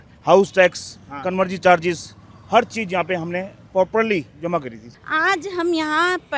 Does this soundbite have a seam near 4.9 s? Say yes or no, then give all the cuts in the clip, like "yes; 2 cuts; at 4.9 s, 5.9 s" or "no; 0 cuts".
yes; 1 cut; at 4.9 s